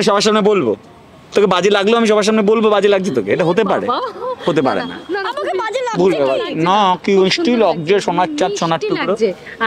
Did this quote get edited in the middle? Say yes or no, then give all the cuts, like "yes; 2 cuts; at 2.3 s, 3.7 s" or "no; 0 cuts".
no; 0 cuts